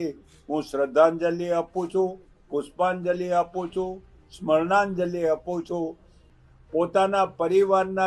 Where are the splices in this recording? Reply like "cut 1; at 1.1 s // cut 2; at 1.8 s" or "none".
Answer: cut 1; at 6.2 s